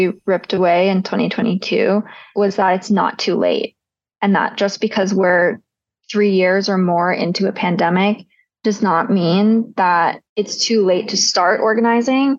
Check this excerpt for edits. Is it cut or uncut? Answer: cut